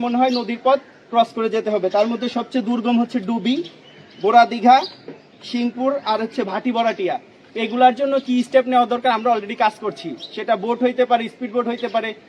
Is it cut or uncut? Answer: uncut